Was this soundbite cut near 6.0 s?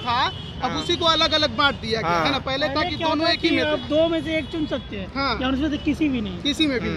no; 0 cuts

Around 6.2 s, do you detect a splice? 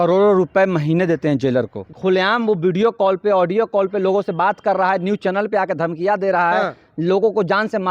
no; 1 cut; at 1.9 s

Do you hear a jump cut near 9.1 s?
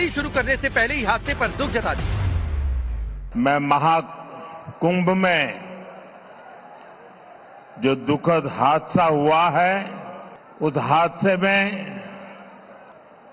no; 0 cuts

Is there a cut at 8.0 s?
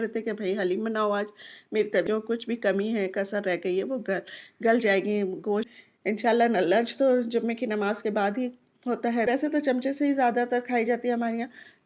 no; 3 cuts; at 2.0 s, 5.7 s, 9.2 s

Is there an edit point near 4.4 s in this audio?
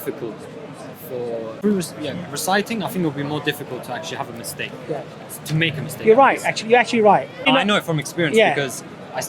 no; 2 cuts; at 1.6 s, 7.5 s

